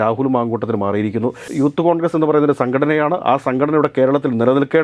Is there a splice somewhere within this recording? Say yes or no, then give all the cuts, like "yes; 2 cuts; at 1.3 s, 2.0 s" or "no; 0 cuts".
yes; 1 cut; at 1.5 s